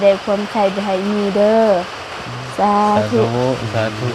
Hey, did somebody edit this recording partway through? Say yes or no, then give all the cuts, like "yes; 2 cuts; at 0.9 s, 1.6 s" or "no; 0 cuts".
no; 0 cuts